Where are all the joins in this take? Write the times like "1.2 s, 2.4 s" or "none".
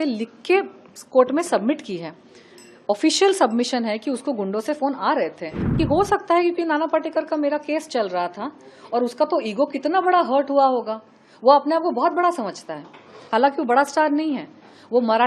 5.7 s

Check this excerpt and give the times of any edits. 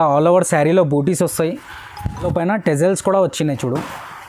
2.2 s

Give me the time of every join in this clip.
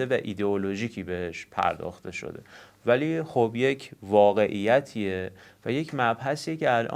none

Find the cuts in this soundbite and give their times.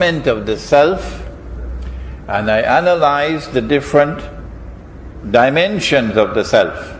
none

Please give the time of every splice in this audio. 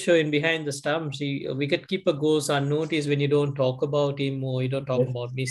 none

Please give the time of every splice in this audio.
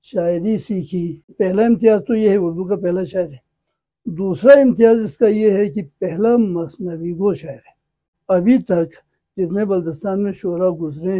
1.3 s, 8.1 s

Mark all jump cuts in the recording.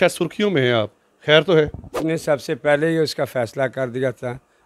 2.0 s

